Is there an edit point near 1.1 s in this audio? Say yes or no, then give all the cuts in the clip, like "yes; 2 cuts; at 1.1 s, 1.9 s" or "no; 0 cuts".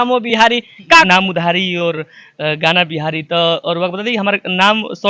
yes; 1 cut; at 1.1 s